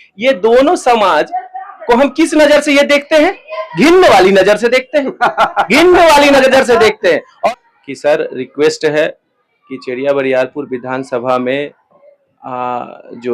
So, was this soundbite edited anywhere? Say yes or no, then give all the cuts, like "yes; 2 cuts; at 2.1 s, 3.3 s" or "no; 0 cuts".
yes; 1 cut; at 7.3 s